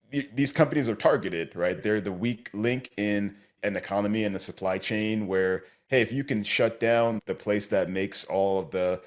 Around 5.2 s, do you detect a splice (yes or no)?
no